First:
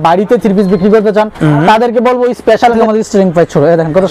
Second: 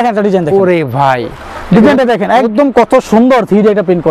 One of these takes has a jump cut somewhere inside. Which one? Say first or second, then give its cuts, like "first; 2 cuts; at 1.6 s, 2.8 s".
first; 1 cut; at 2.8 s